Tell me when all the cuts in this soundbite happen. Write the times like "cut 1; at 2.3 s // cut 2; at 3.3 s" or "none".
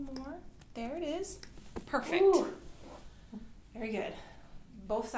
none